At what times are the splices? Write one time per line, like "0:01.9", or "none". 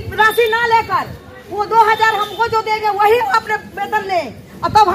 none